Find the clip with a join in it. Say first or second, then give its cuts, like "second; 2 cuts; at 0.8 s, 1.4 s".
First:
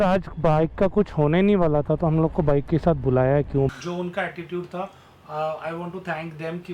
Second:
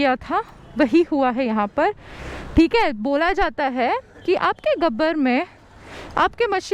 first; 1 cut; at 3.8 s